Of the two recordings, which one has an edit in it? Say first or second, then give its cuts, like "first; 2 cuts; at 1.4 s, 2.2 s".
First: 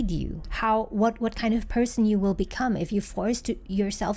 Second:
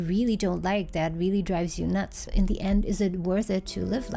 second; 1 cut; at 2.3 s